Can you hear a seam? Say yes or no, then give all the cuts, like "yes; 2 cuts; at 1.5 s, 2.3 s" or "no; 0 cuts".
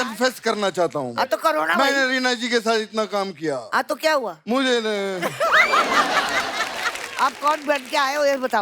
yes; 1 cut; at 7.0 s